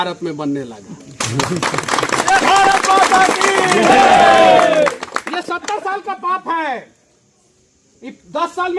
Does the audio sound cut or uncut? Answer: uncut